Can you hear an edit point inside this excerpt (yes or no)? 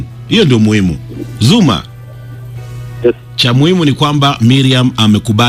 no